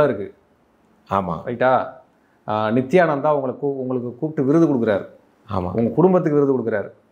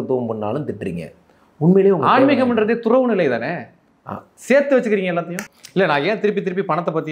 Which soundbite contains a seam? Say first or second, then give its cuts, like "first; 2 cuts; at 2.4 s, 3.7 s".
second; 1 cut; at 5.4 s